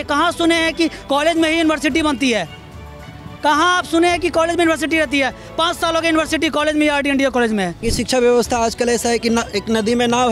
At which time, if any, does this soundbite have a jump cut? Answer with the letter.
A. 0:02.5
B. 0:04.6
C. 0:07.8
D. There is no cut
C